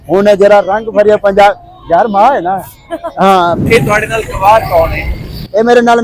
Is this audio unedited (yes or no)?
no